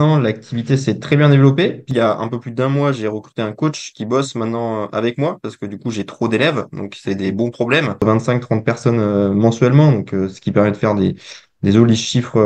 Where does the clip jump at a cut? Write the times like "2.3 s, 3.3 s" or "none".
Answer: 1.9 s, 8.0 s